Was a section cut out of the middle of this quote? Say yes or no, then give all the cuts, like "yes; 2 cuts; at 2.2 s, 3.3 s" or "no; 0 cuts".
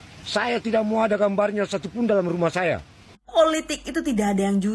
yes; 1 cut; at 3.2 s